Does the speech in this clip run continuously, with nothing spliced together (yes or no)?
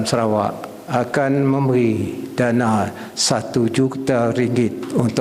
yes